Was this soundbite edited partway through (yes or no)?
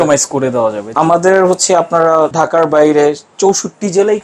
yes